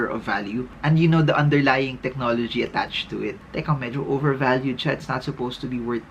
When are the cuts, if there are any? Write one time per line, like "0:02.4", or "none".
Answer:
0:03.4

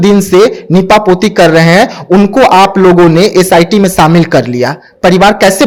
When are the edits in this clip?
none

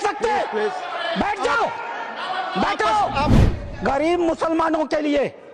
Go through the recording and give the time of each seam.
0:03.3

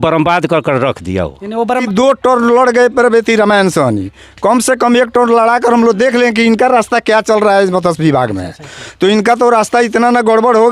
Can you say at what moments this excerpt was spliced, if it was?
0:01.7

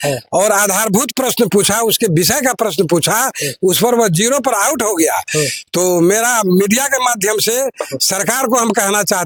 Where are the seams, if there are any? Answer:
none

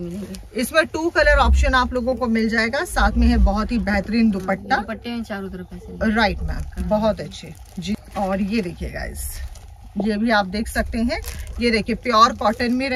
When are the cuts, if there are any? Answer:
none

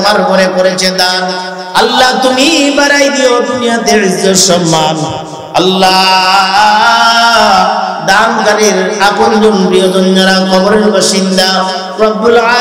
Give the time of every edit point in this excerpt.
none

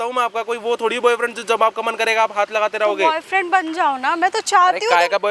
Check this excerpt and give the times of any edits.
none

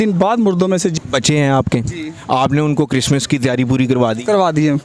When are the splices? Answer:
0:00.9

